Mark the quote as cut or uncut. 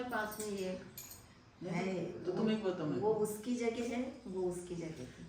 uncut